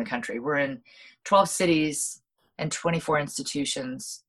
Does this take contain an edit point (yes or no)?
no